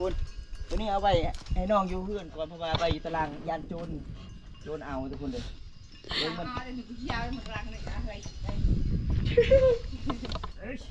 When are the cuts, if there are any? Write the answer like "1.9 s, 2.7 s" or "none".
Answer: none